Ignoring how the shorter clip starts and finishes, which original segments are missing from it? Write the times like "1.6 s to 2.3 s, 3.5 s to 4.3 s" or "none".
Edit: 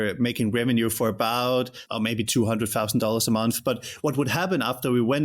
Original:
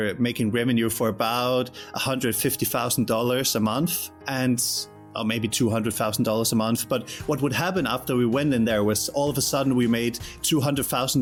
1.8 s to 5.0 s

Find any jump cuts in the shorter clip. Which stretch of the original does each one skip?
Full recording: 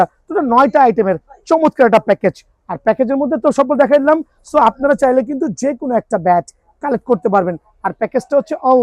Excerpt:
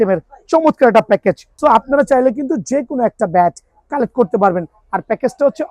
2.5 s to 4.4 s

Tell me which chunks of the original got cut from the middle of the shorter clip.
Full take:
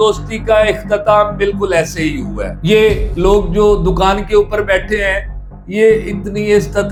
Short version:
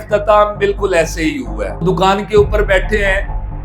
2.6 s to 3.8 s

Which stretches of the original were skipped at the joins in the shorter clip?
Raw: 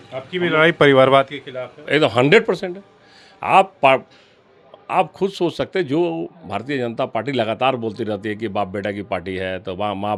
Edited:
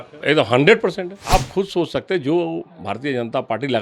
2.7 s to 4.7 s

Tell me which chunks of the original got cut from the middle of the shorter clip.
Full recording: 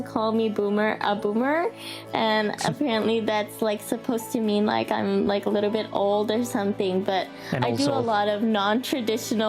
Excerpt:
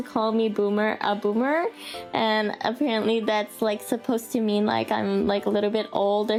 none

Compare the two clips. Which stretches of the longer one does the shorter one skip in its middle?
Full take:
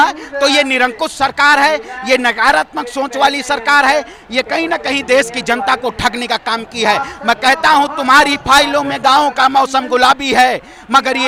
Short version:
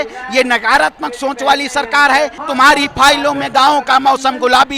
4.2 s to 7.9 s

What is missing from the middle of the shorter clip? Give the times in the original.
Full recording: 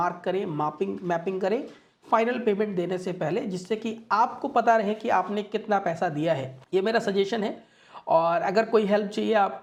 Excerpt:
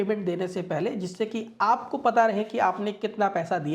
none

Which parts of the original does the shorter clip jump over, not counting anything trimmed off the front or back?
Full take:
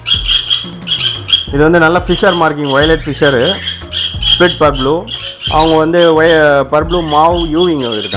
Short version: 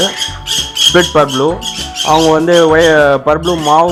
none

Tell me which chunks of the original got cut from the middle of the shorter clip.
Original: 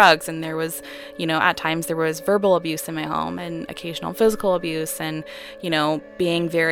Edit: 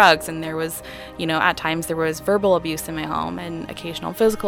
none

